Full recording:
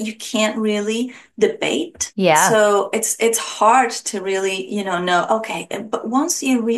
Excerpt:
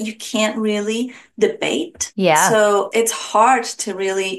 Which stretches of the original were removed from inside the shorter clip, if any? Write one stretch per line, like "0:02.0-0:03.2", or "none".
0:02.9-0:03.1